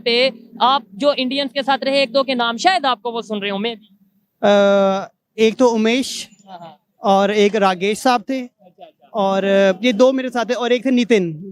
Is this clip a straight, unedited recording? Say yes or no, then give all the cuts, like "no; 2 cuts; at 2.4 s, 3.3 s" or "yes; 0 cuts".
yes; 0 cuts